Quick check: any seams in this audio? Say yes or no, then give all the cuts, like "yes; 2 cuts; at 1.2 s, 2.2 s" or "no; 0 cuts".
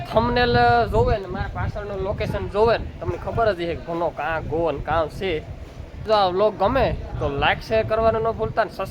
yes; 1 cut; at 6.0 s